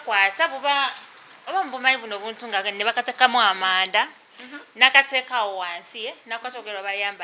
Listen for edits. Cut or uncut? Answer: uncut